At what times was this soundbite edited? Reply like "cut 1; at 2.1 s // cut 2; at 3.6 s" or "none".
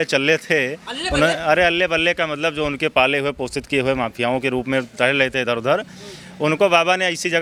none